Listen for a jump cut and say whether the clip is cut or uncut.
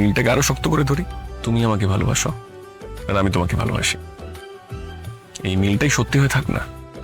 cut